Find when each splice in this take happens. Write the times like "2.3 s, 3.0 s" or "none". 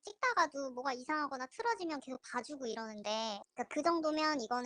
3.5 s